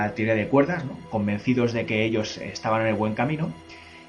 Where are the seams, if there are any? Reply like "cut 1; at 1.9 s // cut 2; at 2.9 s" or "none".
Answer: none